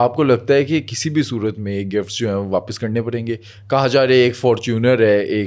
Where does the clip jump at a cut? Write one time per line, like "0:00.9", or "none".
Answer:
none